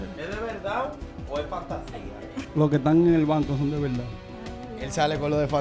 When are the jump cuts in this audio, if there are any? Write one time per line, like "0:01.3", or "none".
0:02.4